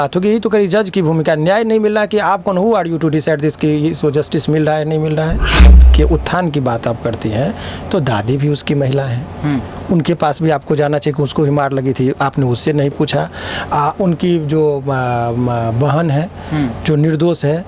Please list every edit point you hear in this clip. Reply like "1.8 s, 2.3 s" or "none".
5.8 s